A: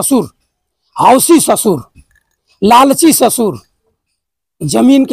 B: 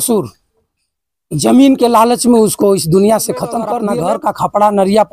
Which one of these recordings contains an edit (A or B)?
B